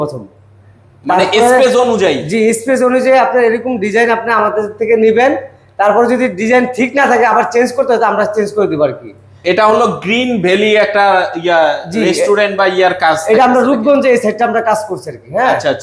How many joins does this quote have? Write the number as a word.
zero